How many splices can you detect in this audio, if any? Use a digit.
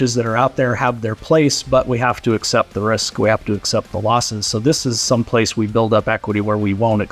0